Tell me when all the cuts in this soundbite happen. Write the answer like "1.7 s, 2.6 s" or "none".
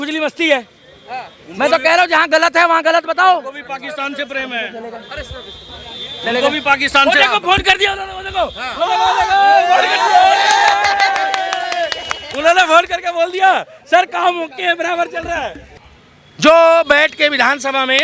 15.7 s